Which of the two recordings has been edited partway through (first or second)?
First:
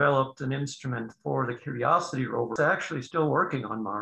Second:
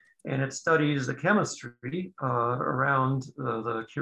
first